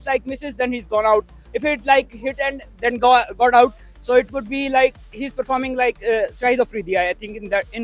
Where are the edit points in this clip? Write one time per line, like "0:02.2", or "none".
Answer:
none